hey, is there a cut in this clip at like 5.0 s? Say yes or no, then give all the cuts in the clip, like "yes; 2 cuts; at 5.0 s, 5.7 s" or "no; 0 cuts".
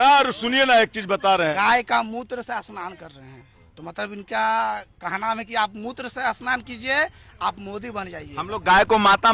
no; 2 cuts; at 1.5 s, 3.6 s